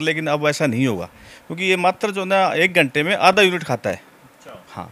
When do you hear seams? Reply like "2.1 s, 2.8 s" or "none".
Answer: none

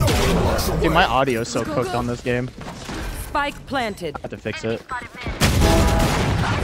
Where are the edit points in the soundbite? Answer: none

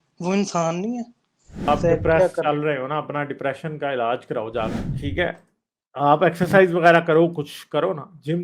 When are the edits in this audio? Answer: 1.7 s, 4.8 s

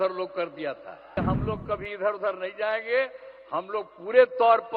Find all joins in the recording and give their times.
1.2 s

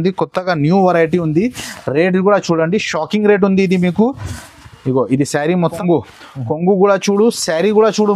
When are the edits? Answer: 5.8 s

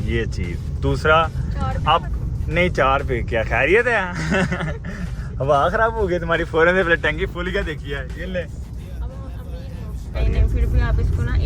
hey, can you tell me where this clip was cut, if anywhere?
10.2 s

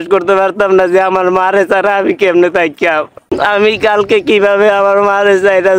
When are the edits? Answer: 3.3 s

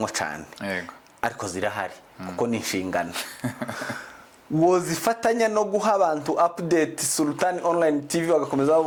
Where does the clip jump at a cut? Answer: none

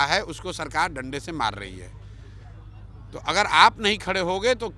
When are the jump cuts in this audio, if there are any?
none

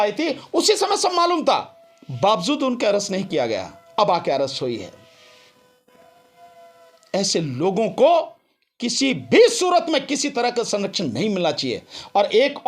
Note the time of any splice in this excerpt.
none

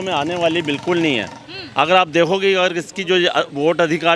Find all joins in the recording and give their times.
none

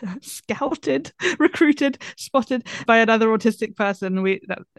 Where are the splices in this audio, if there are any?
2.8 s

